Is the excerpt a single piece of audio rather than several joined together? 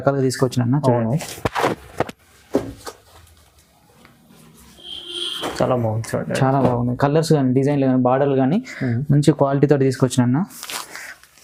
yes; 0 cuts

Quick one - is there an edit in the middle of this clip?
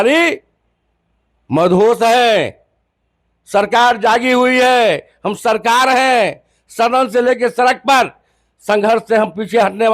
no; 0 cuts

